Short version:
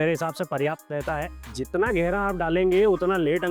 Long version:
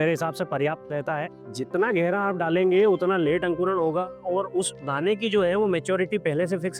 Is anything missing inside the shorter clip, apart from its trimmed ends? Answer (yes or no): no